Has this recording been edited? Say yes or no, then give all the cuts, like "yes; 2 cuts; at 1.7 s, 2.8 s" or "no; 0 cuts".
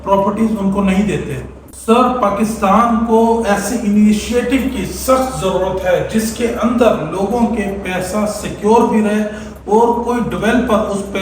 no; 0 cuts